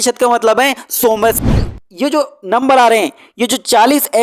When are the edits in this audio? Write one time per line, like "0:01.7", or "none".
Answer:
0:01.3